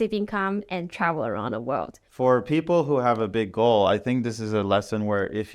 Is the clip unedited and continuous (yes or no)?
no